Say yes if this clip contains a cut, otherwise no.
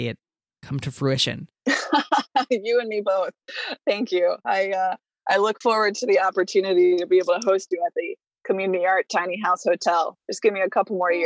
yes